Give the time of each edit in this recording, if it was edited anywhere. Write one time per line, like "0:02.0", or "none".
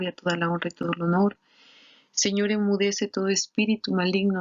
0:02.3